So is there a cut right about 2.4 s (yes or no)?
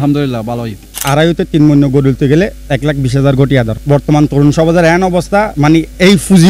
no